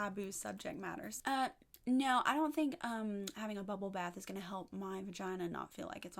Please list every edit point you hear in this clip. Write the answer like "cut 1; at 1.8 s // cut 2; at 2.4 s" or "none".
cut 1; at 1.2 s